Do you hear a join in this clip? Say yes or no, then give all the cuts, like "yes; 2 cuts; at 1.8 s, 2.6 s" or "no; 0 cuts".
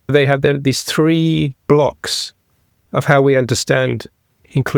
no; 0 cuts